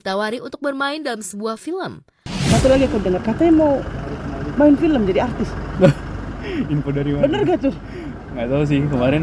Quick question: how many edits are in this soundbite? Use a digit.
1